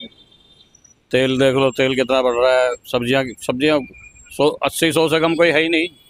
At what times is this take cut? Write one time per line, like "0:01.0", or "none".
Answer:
none